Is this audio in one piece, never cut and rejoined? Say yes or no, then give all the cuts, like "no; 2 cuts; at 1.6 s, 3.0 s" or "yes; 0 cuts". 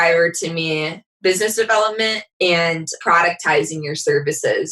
no; 1 cut; at 2.9 s